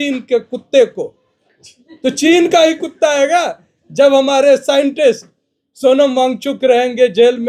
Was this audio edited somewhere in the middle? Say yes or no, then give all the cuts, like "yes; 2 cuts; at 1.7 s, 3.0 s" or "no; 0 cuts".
no; 0 cuts